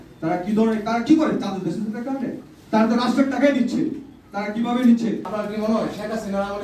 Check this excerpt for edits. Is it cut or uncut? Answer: cut